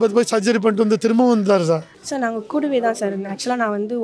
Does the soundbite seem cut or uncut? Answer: cut